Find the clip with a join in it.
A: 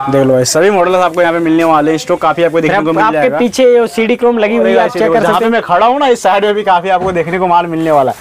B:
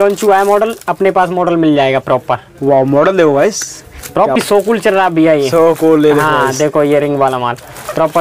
B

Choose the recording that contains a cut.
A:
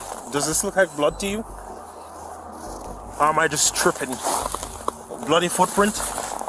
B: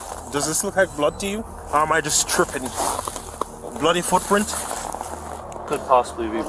B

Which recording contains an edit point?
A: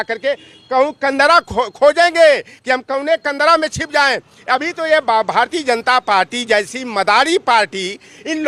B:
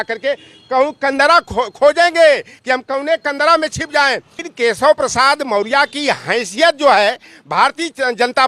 B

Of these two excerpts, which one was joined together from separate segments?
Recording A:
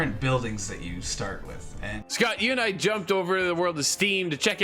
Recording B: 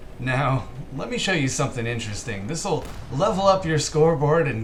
A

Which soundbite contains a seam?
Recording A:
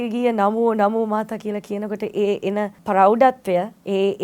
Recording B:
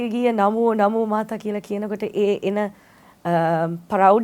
A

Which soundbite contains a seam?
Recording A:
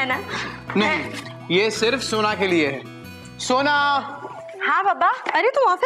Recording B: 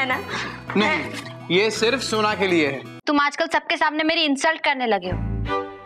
B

